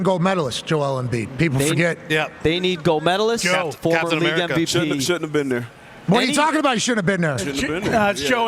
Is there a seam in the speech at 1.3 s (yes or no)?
yes